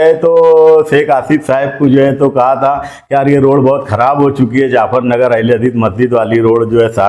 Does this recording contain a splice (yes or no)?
no